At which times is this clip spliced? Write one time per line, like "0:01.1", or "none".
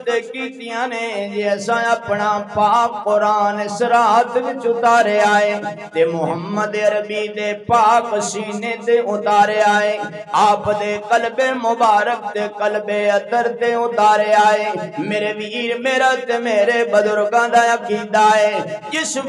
none